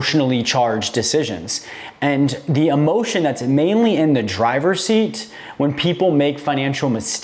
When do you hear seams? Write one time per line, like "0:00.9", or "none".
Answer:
none